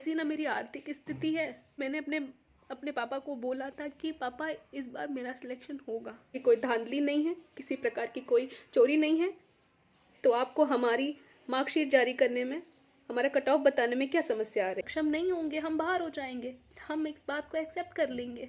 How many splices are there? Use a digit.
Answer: 3